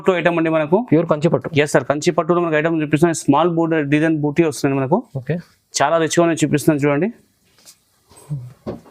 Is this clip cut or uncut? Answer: uncut